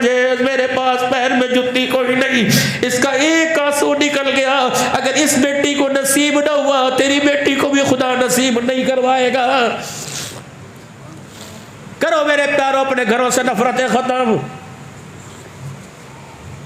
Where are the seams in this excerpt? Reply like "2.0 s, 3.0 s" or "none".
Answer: 10.9 s